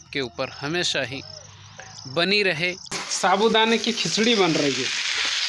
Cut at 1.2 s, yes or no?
no